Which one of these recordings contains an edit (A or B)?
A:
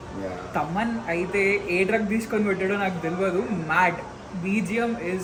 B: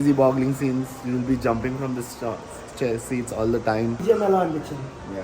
B